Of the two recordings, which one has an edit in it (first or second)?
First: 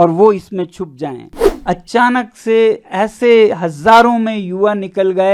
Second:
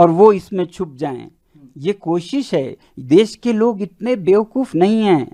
first